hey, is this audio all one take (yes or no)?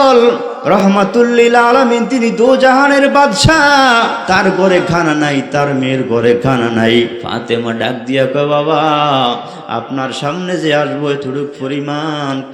no